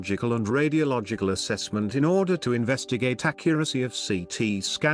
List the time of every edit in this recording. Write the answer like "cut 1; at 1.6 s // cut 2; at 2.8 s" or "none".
cut 1; at 3.3 s